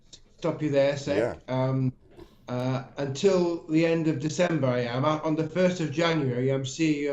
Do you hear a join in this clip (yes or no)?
no